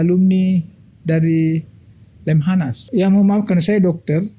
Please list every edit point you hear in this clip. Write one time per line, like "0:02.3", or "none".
0:02.8